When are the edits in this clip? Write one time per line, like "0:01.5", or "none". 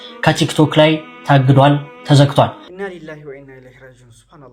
0:02.6